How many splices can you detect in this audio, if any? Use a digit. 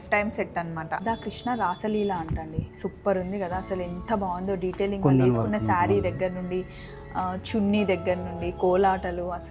1